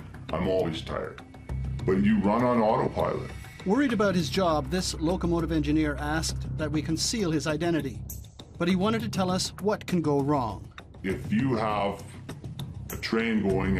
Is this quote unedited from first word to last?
no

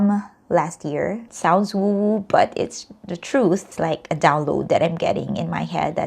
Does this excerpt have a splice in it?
yes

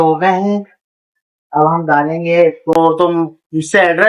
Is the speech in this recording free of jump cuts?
no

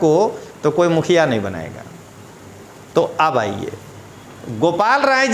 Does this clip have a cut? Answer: no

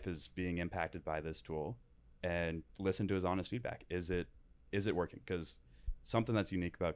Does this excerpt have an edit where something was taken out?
no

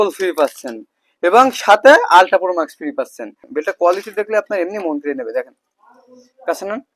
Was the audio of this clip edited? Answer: yes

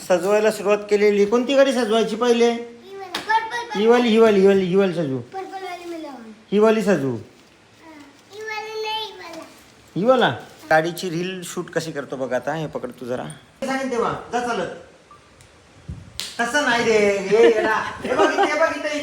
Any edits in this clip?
yes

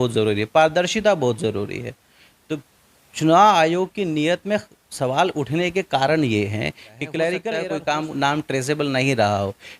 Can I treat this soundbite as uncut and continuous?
no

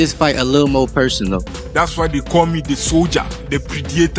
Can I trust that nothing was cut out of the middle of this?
no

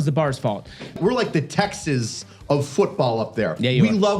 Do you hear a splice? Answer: yes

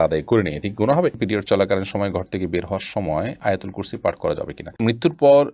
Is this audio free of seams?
no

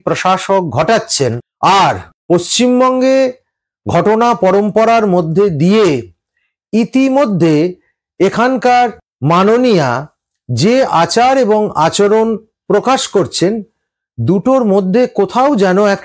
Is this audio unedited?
yes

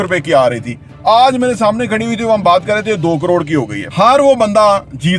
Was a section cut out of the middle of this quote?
yes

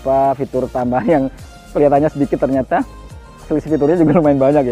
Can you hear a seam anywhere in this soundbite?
no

